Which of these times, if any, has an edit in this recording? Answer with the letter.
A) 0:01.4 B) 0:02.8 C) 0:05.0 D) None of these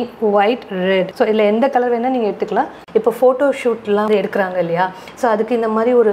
B